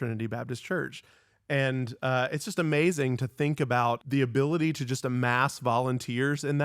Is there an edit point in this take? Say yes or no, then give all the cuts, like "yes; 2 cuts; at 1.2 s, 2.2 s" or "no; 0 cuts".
yes; 1 cut; at 4.0 s